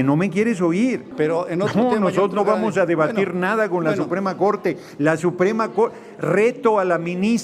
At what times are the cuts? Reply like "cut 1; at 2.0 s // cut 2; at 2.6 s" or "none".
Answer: cut 1; at 1.1 s